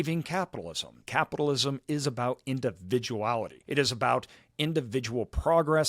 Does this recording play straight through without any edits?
no; 2 cuts; at 1.0 s, 3.6 s

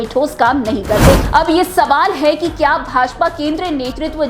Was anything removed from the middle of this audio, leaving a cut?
yes; 1 cut; at 1.2 s

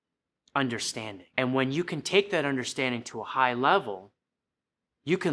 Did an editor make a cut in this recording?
yes; 1 cut; at 1.2 s

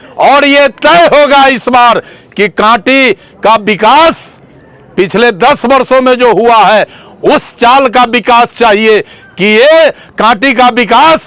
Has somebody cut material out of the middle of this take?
no; 0 cuts

